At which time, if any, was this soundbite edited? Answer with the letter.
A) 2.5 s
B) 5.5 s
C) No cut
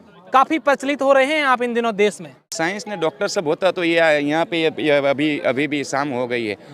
A